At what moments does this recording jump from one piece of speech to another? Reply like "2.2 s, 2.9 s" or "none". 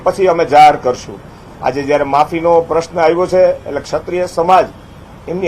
2.3 s